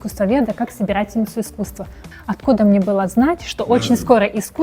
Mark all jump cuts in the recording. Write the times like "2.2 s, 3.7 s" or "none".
2.0 s